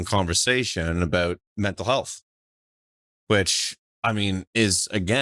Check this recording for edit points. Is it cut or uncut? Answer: cut